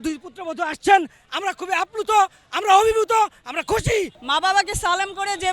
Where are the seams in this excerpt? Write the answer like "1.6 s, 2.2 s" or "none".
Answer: 4.1 s